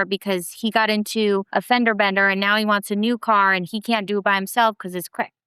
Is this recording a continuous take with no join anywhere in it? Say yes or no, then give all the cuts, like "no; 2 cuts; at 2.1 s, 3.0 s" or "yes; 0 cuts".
no; 1 cut; at 1.5 s